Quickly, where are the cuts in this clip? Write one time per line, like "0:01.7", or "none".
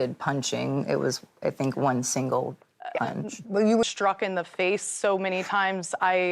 0:03.8